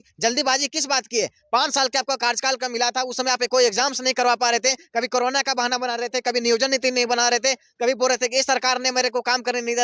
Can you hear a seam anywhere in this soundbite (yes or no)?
no